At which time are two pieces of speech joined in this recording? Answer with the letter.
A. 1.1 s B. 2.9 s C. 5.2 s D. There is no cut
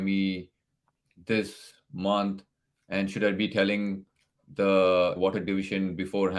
C